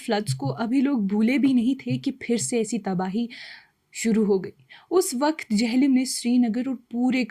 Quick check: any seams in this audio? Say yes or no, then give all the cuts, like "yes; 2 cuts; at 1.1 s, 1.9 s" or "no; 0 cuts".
no; 0 cuts